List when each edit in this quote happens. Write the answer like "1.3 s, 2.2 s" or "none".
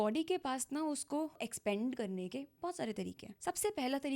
1.5 s, 3.3 s